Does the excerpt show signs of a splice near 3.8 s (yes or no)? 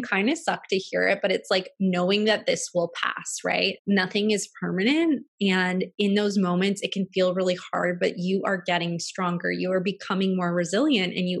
yes